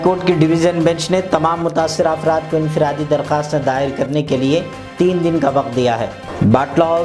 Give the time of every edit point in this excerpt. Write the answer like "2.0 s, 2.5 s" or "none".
none

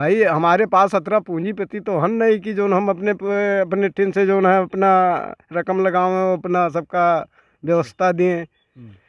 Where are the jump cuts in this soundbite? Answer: none

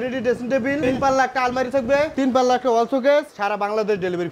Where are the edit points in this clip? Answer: 0.8 s, 2.1 s, 3.3 s

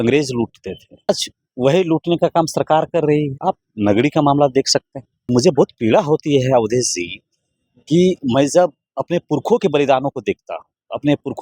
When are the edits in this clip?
1.1 s, 3.3 s, 5.3 s

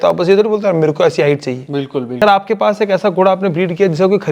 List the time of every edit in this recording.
2.2 s

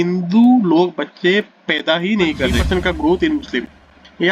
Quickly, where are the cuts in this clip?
2.6 s

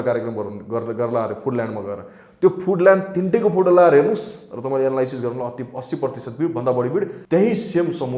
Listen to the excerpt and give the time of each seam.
7.2 s

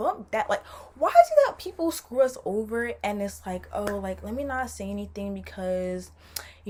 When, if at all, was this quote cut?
none

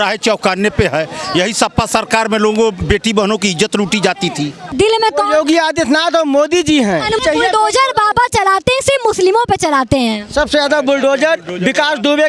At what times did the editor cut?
4.7 s, 7.2 s

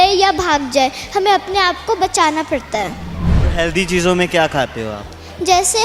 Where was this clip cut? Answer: 3.4 s

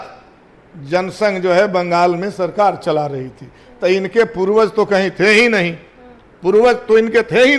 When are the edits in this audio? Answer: none

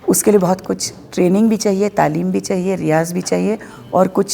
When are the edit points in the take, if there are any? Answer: none

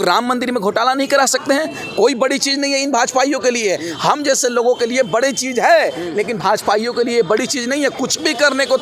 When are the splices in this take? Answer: none

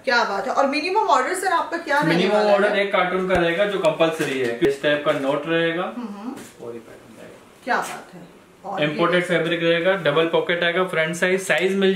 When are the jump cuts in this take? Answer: 4.7 s

